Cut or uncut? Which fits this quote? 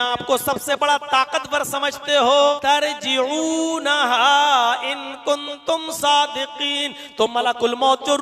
cut